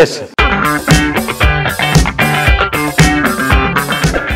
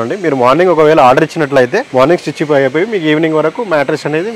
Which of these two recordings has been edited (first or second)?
second